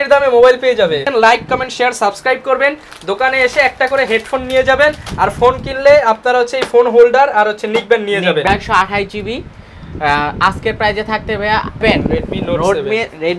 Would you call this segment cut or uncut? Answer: cut